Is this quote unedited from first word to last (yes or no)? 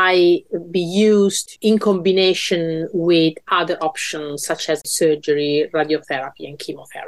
no